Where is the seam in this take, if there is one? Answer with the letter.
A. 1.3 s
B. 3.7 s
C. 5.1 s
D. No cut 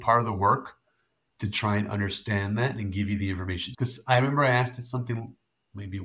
B